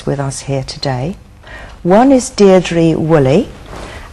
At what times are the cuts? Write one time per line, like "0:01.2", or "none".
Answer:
0:02.1